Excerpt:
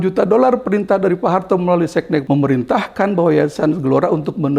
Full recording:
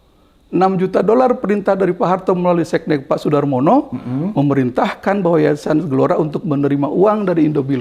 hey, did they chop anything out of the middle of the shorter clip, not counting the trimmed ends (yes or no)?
yes